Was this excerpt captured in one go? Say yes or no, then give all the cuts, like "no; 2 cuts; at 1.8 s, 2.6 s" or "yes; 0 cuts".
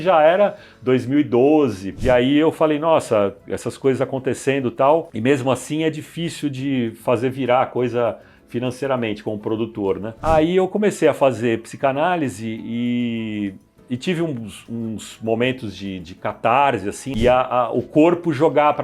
no; 3 cuts; at 1.9 s, 10.2 s, 17.1 s